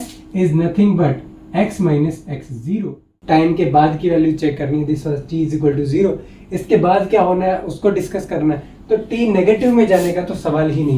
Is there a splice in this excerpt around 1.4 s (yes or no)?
no